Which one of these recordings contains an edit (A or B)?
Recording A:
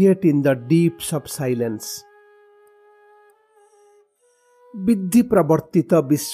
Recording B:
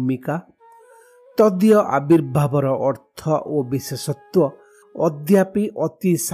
A